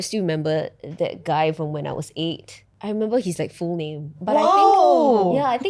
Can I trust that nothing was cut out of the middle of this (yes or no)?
no